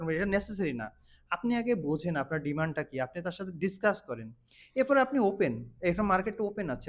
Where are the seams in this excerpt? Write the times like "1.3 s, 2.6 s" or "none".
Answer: none